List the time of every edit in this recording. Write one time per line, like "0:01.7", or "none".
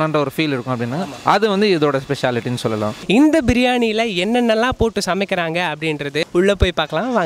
0:03.0
0:06.2